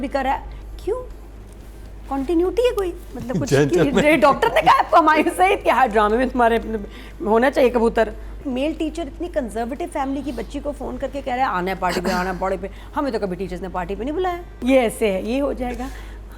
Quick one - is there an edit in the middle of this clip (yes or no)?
yes